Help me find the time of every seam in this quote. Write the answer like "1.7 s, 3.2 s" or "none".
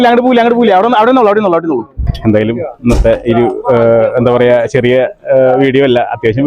2.1 s